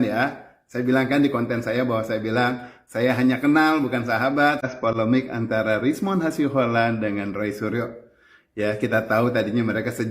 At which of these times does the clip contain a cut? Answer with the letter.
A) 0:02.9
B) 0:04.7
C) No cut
B